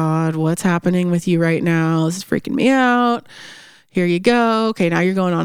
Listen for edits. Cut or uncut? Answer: uncut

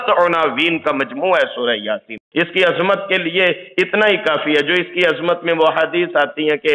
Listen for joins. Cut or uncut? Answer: cut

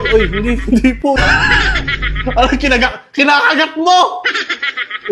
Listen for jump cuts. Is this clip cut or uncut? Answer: cut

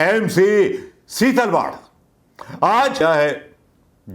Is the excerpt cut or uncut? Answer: cut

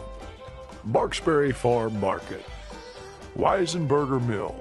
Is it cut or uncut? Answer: uncut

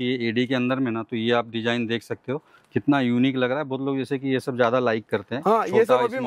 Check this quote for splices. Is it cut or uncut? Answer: uncut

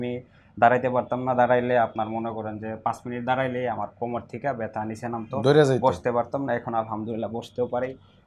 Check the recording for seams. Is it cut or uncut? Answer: uncut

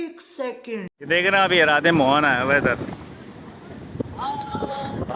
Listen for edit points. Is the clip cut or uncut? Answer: uncut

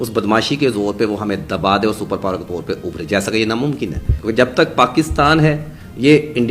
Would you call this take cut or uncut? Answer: cut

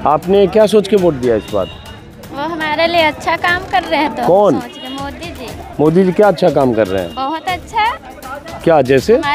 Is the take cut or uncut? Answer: uncut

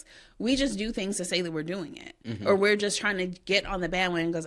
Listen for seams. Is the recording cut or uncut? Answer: uncut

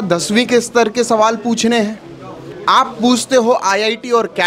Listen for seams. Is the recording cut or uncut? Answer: uncut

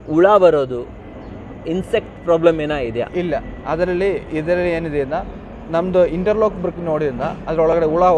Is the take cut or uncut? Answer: uncut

